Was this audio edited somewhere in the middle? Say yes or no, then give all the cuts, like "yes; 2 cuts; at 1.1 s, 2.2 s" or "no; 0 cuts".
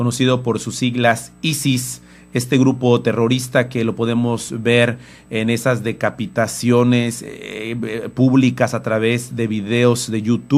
no; 0 cuts